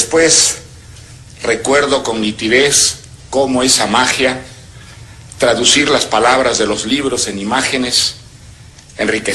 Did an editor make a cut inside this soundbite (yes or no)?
no